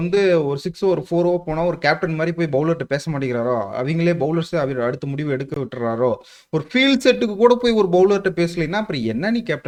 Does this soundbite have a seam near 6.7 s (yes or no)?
no